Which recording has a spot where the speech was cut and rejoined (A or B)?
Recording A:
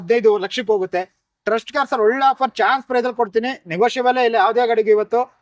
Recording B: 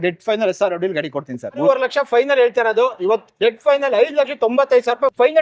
B